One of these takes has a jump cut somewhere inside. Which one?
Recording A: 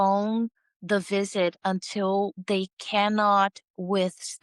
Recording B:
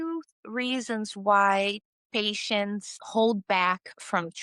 B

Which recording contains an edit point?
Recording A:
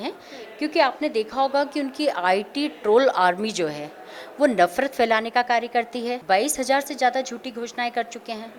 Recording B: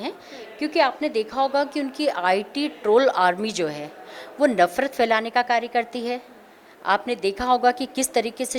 A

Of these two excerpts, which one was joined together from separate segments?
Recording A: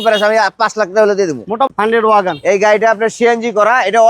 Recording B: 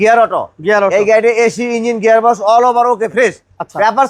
A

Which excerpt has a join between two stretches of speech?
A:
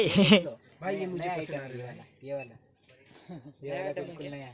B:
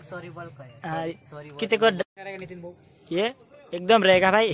B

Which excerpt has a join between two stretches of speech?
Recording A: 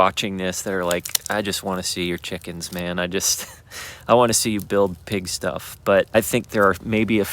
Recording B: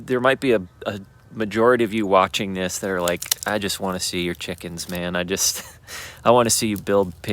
A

